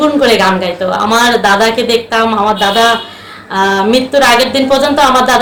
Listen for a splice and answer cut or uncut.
uncut